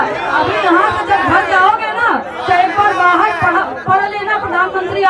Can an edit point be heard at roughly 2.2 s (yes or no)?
no